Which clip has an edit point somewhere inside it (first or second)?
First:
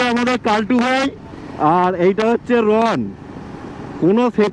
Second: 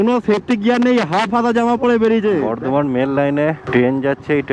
second